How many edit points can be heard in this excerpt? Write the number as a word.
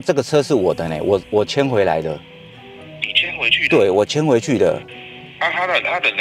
zero